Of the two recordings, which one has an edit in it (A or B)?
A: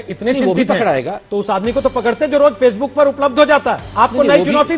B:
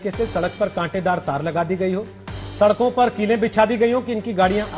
A